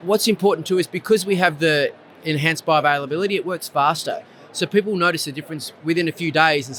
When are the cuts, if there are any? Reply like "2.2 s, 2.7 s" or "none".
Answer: none